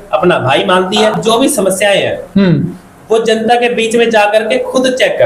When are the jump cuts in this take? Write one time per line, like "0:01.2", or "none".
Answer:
0:01.2